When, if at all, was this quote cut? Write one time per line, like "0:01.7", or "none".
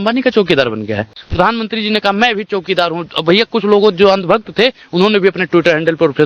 none